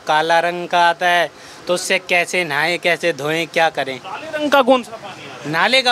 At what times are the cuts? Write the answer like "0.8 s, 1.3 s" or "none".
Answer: none